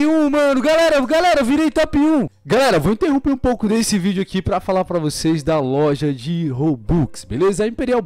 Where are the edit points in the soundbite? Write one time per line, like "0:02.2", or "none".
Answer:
0:02.4